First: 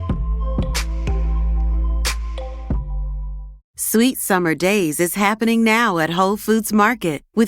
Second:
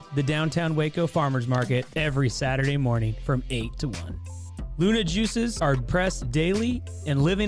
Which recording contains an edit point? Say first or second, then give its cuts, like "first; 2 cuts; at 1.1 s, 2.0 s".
first; 1 cut; at 3.6 s